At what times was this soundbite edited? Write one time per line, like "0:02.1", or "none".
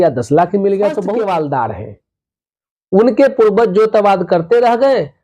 0:01.0